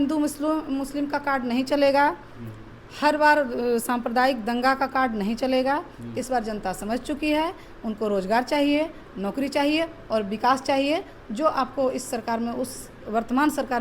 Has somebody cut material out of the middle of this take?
no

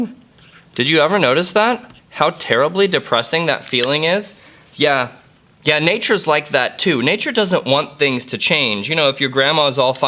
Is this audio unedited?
no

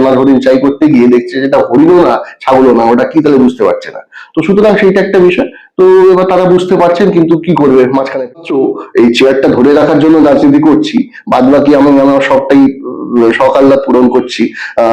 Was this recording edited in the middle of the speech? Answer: yes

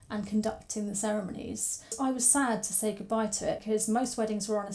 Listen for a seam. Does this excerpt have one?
yes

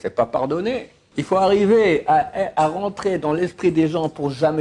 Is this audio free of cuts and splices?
no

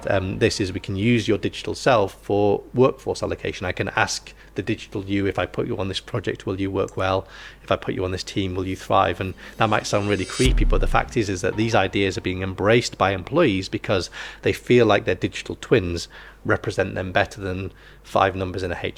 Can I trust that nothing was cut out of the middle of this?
yes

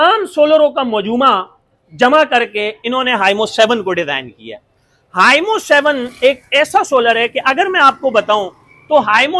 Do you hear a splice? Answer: no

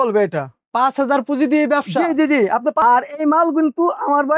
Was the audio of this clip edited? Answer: yes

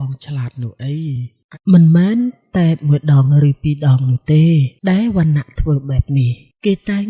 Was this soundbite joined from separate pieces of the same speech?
yes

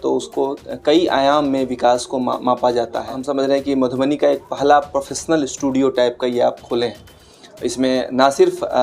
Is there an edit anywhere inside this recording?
yes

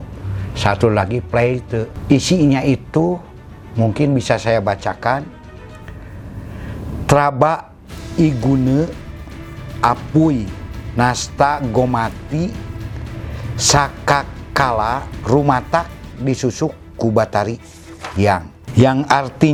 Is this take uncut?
yes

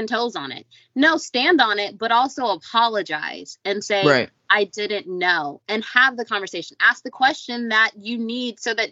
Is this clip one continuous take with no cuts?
yes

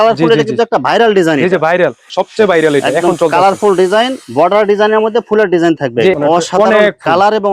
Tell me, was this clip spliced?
yes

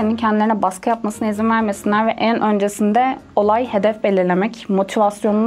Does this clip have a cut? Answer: no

